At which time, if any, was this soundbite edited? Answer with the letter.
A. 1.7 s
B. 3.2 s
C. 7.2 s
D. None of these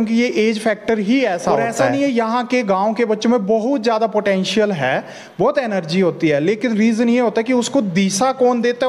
A